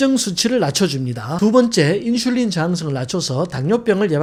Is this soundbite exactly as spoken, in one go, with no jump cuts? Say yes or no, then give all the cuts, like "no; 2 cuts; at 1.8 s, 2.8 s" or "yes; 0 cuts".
yes; 0 cuts